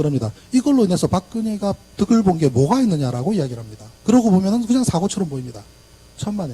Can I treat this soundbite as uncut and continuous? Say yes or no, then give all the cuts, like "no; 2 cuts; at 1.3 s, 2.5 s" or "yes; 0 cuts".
no; 1 cut; at 1.4 s